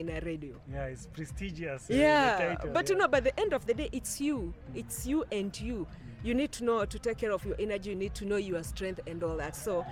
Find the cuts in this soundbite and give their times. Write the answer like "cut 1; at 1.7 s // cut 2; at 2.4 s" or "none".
none